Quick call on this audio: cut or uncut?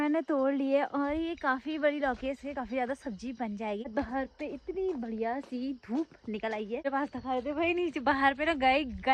cut